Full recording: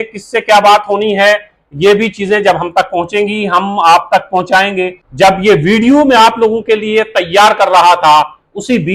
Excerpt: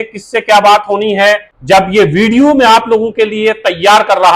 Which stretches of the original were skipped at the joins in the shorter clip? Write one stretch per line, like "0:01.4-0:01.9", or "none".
0:01.5-0:05.0